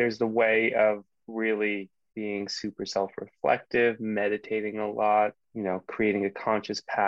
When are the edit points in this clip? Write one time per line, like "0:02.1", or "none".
0:02.0
0:05.5